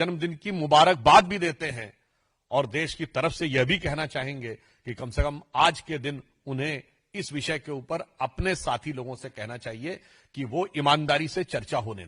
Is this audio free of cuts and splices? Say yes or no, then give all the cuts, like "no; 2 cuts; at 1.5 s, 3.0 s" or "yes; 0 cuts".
yes; 0 cuts